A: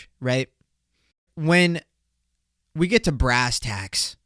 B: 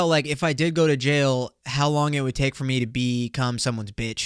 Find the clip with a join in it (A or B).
A